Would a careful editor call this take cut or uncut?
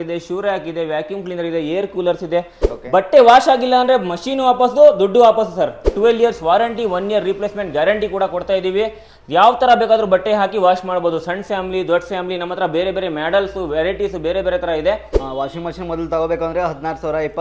cut